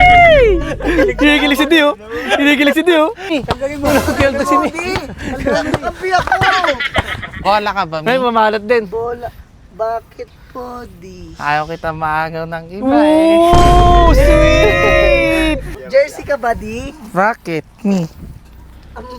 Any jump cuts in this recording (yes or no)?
yes